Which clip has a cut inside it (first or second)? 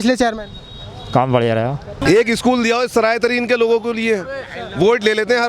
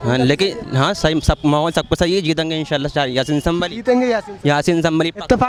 first